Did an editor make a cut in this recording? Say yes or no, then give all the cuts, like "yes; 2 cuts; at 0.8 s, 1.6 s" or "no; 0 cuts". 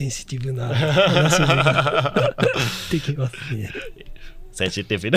no; 0 cuts